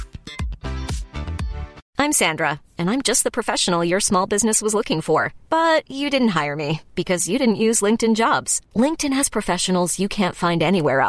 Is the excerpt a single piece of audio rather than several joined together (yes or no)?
no